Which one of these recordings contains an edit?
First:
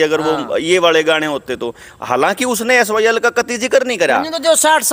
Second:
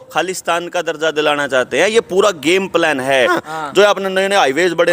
second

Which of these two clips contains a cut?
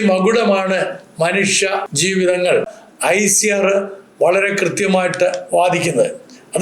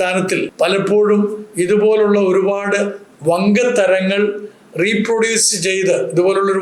first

